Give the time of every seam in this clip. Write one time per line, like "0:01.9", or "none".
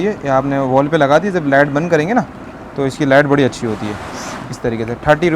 none